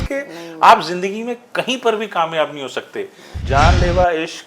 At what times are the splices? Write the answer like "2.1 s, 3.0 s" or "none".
3.3 s